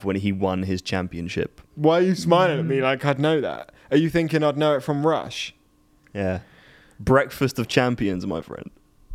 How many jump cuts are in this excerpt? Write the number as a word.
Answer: one